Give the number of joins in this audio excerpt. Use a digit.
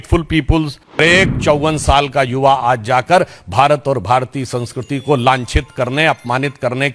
1